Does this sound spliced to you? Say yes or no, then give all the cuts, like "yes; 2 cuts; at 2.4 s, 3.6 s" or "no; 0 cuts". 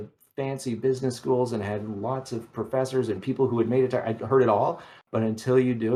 no; 0 cuts